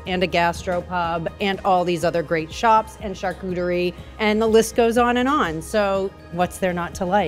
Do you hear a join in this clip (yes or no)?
yes